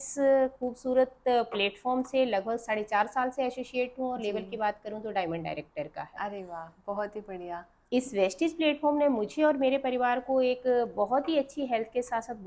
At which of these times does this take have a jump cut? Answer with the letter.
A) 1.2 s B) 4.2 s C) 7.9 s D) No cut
D